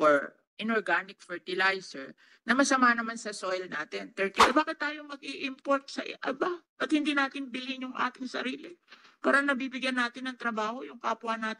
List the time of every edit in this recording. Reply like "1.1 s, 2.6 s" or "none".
4.4 s